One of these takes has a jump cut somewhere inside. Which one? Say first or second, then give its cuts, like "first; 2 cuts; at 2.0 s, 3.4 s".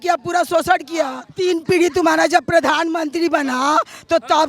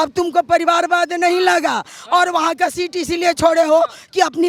first; 1 cut; at 1.2 s